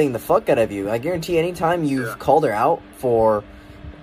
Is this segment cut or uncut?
uncut